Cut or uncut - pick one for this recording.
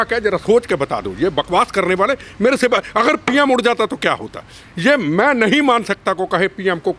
uncut